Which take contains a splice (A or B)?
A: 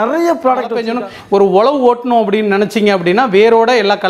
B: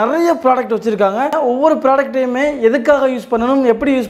A